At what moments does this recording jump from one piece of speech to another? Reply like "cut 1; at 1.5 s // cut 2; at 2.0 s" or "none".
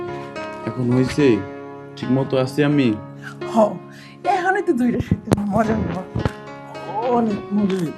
none